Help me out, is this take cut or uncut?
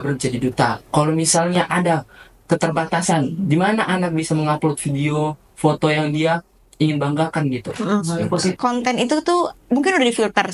cut